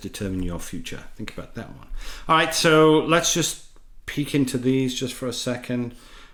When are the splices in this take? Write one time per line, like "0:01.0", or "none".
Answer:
none

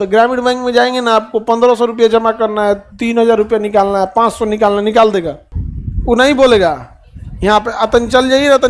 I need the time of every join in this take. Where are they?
none

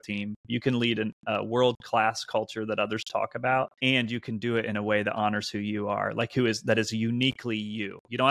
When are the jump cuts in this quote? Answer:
0:03.7

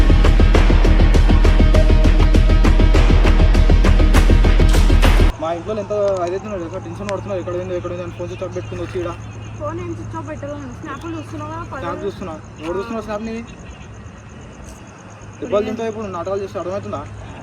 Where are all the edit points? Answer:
0:05.3

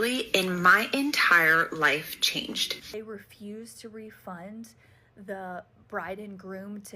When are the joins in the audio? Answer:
0:02.9

